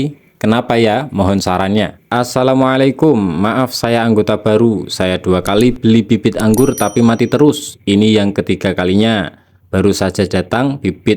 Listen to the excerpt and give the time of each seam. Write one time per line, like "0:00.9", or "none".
0:02.1